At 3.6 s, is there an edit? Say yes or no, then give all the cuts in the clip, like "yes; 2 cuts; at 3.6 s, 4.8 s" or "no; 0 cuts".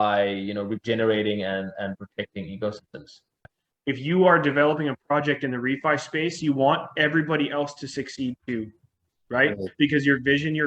yes; 1 cut; at 3.6 s